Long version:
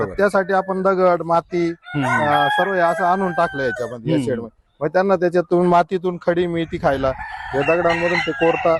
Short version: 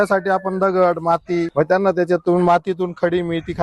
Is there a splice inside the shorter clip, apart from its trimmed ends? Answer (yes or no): yes